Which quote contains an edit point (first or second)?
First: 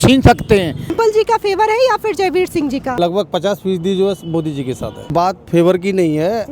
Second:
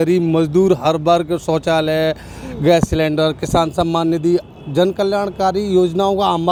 first